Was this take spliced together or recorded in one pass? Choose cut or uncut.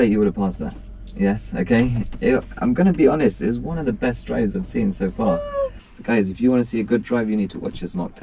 cut